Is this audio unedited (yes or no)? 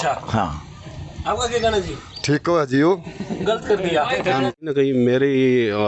no